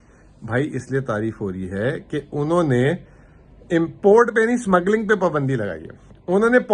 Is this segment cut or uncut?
uncut